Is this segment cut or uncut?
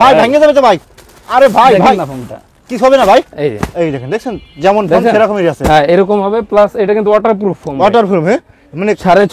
uncut